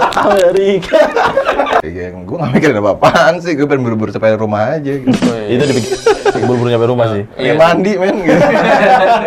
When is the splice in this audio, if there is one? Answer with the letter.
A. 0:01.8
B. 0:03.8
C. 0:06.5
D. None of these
A